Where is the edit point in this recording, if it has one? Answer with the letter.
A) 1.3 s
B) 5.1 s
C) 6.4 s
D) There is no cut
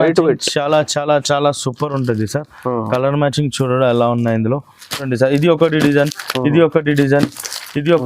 B